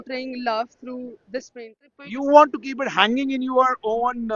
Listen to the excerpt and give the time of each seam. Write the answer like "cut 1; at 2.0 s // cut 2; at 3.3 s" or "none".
cut 1; at 1.9 s